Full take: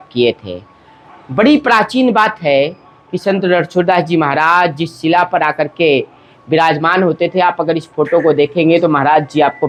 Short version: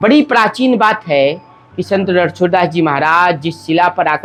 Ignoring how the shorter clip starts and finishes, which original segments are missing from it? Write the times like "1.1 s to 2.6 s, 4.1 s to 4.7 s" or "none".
none